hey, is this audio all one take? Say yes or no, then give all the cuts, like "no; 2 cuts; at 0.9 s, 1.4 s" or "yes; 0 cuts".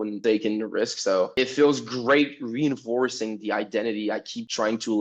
yes; 0 cuts